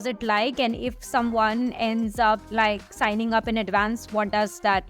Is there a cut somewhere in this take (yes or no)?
no